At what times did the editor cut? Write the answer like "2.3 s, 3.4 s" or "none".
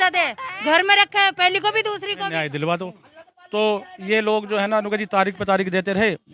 2.4 s